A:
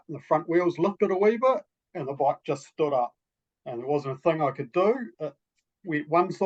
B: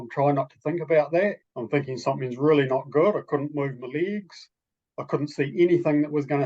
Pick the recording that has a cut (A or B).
B